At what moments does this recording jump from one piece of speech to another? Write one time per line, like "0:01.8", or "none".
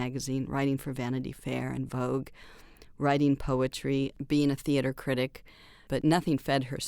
0:04.2
0:05.8